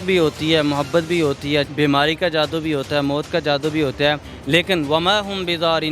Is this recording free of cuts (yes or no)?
no